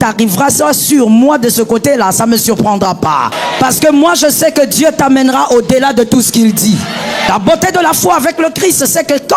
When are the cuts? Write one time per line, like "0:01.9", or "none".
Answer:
0:03.4
0:07.3